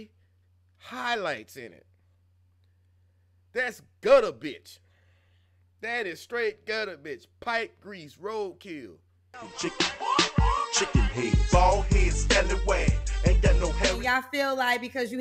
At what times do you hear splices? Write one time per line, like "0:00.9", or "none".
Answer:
0:14.0

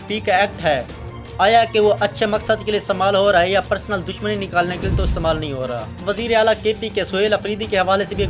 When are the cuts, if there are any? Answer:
0:06.0

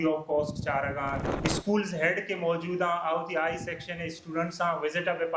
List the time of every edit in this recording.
0:01.2

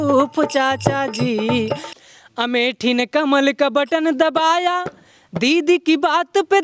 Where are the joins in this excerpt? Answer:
0:01.9

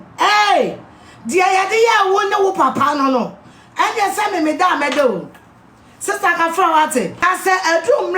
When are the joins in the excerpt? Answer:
0:07.2

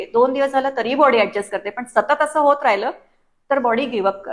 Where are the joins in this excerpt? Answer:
none

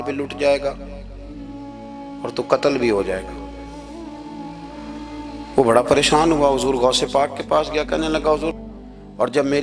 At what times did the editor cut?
0:08.5

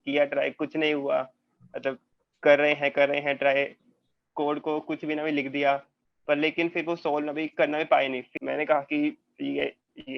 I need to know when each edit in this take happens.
0:08.3

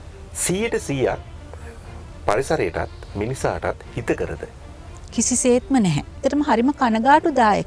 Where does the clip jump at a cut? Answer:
0:06.2

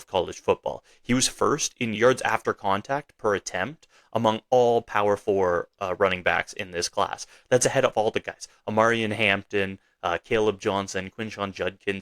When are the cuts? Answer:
0:01.9

